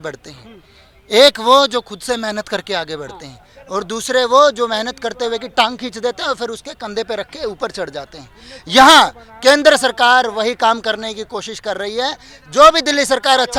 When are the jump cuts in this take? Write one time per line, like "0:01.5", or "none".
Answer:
none